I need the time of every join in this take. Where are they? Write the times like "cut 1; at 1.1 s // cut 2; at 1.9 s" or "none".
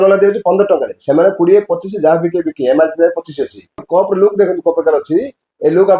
cut 1; at 3.8 s